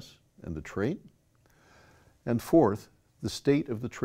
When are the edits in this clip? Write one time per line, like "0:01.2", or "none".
0:02.2